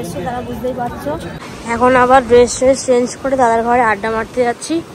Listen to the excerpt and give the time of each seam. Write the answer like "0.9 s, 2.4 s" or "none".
1.4 s